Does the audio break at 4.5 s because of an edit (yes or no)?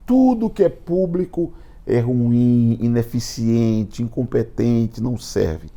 no